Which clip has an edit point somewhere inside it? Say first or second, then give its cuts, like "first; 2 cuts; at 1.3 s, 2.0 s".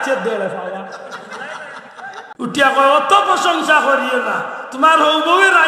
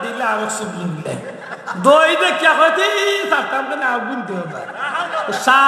first; 1 cut; at 2.3 s